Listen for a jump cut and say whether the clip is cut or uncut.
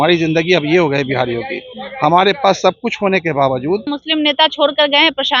cut